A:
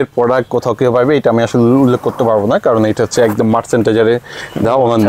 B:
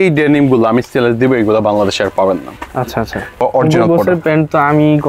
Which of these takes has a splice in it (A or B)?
B